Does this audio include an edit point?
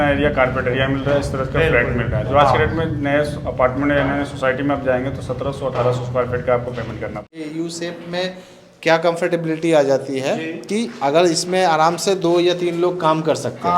yes; 1 cut; at 7.4 s

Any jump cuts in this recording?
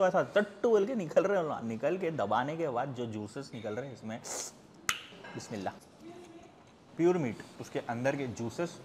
no; 0 cuts

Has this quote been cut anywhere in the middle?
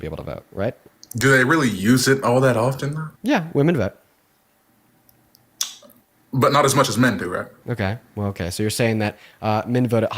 yes; 3 cuts; at 0.9 s, 3.0 s, 7.6 s

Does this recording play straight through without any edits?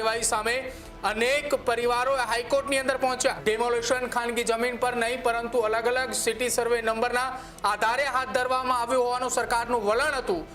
no; 1 cut; at 3.4 s

